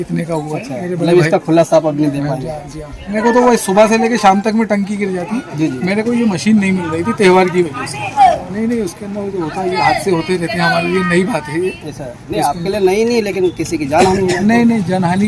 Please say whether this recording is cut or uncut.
cut